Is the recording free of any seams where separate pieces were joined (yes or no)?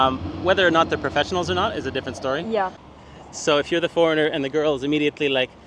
no